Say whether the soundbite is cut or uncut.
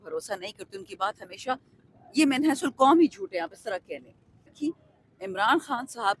cut